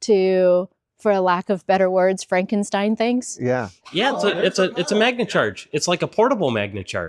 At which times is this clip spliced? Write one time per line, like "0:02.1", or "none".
0:03.9